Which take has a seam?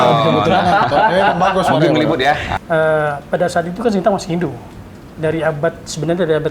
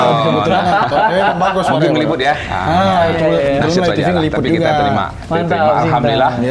first; 1 cut; at 2.5 s

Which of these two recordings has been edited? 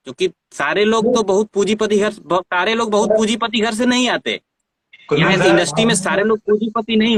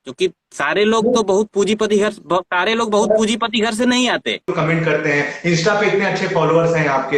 second; 1 cut; at 4.5 s

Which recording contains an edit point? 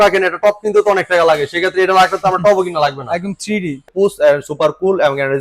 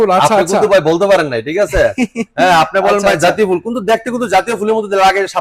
first; 1 cut; at 3.8 s

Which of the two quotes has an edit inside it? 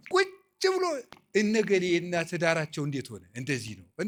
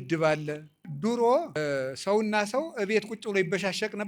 second; 2 cuts; at 0.9 s, 1.6 s

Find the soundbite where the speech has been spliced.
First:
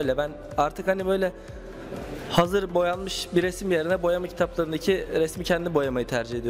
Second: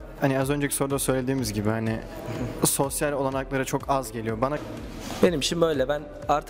second; 1 cut; at 4.6 s

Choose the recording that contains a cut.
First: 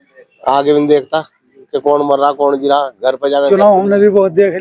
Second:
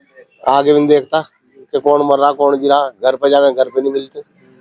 first; 1 cut; at 3.5 s

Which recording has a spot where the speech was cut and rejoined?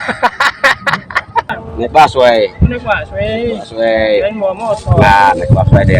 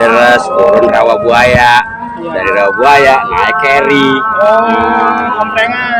first; 1 cut; at 1.5 s

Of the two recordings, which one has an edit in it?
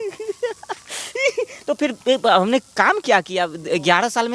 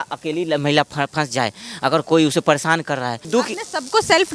second; 1 cut; at 3.2 s

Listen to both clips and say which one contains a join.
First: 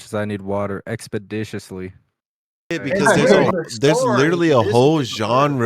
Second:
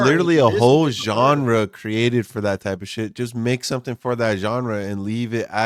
first; 1 cut; at 2.8 s

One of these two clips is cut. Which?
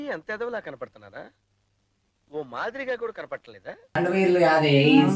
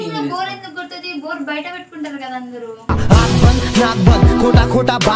first; 1 cut; at 3.9 s

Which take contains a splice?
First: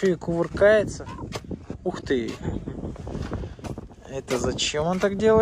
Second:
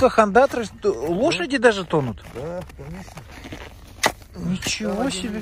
first; 2 cuts; at 1.0 s, 3.9 s

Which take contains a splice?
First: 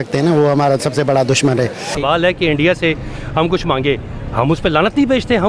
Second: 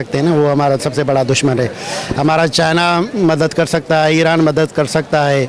first; 1 cut; at 2.0 s

